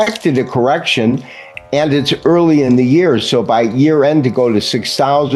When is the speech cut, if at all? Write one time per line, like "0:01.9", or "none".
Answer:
none